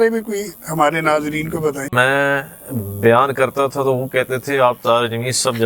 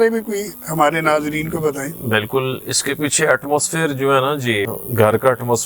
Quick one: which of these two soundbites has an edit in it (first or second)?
first